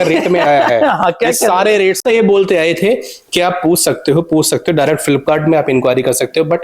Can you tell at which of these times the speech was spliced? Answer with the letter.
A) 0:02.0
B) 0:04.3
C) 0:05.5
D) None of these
A